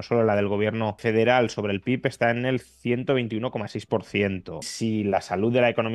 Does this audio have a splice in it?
yes; 2 cuts; at 1.0 s, 4.7 s

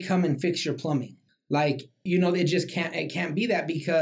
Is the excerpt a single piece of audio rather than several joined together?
no; 1 cut; at 1.8 s

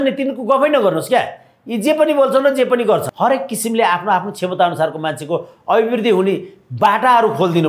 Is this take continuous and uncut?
no; 1 cut; at 3.1 s

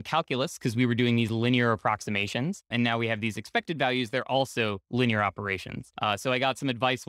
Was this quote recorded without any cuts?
no; 1 cut; at 2.7 s

